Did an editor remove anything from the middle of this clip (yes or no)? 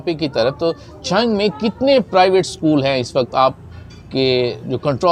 no